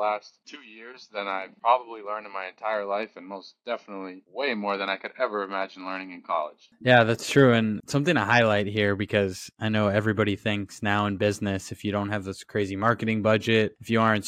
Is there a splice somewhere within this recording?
no; 0 cuts

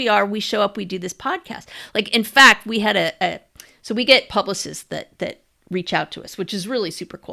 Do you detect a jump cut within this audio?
no; 0 cuts

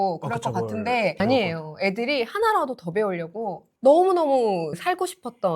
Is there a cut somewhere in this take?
yes; 1 cut; at 3.8 s

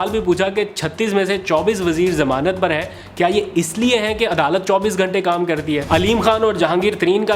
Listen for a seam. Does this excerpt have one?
yes; 1 cut; at 5.8 s

